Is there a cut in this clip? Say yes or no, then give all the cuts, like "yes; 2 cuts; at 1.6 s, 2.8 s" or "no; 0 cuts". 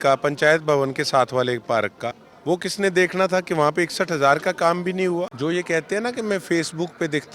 yes; 2 cuts; at 2.3 s, 5.3 s